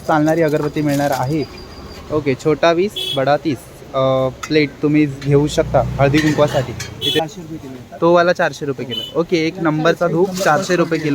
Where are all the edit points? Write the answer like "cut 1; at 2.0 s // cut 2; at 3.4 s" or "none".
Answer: cut 1; at 1.9 s // cut 2; at 7.2 s